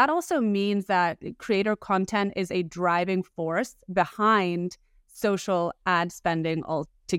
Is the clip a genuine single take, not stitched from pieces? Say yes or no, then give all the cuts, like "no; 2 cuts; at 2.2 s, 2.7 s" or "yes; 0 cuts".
yes; 0 cuts